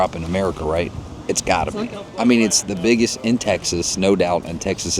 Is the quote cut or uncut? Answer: uncut